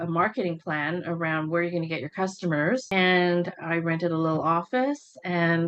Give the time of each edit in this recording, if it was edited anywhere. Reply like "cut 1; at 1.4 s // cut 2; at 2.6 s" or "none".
cut 1; at 2.9 s